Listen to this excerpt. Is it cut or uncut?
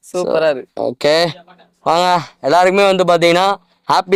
uncut